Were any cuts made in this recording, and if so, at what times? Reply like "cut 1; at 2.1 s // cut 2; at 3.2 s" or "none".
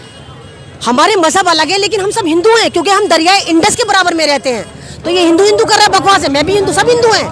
none

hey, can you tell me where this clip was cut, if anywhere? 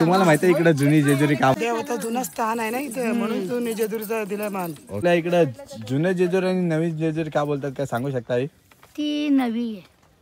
cut 1; at 1.5 s // cut 2; at 5.0 s

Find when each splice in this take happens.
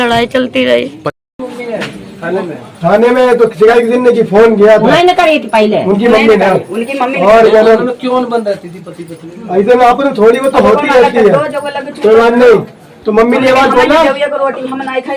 cut 1; at 1.0 s

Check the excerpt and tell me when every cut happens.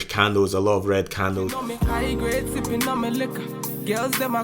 cut 1; at 1.6 s

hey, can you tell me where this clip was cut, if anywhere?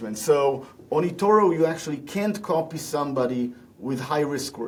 none

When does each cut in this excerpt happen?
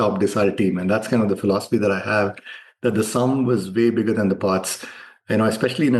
none

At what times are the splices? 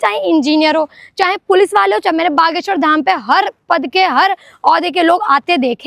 none

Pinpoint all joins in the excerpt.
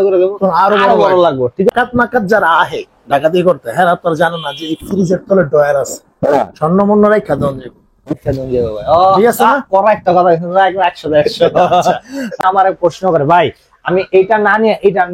cut 1; at 1.7 s // cut 2; at 12.4 s

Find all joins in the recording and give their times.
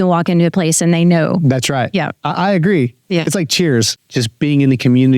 cut 1; at 4.0 s

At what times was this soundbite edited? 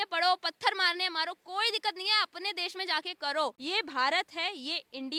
none

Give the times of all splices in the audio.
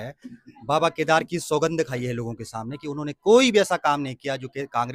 none

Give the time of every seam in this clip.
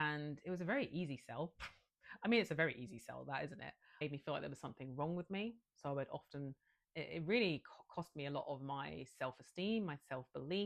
cut 1; at 4.0 s

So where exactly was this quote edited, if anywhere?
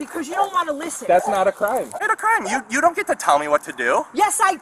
cut 1; at 1.9 s

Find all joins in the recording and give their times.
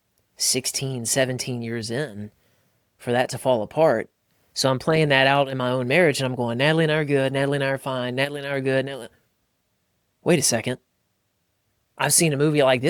none

